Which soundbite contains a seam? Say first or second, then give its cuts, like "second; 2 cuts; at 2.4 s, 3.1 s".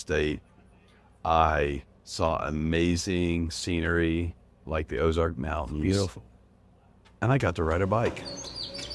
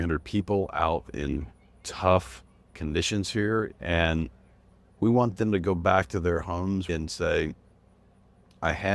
second; 2 cuts; at 3.8 s, 6.9 s